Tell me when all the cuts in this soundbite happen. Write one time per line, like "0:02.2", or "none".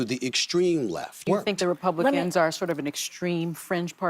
0:01.2